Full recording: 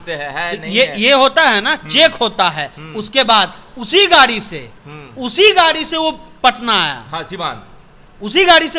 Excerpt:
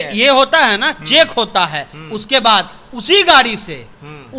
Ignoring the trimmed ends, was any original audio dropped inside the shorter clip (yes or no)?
no